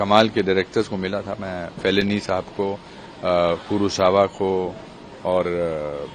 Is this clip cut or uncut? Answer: uncut